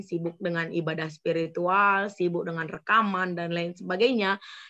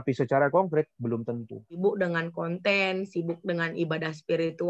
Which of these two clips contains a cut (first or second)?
second